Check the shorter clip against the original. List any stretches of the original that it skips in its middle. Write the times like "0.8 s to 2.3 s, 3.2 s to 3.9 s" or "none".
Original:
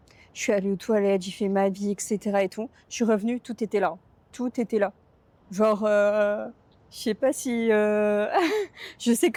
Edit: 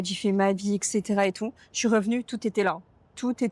none